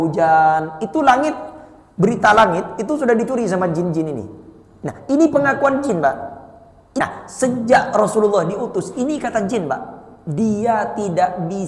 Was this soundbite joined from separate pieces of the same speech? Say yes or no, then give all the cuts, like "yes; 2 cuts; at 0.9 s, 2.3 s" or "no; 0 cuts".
yes; 1 cut; at 7.0 s